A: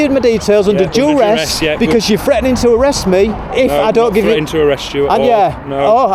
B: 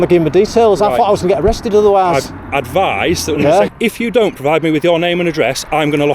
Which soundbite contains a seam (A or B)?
B